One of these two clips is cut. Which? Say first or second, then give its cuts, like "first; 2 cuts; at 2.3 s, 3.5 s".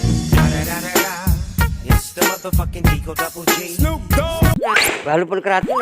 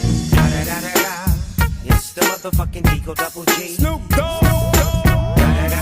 first; 1 cut; at 4.6 s